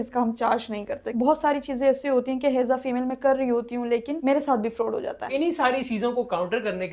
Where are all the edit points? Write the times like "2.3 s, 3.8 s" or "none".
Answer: 1.0 s, 5.3 s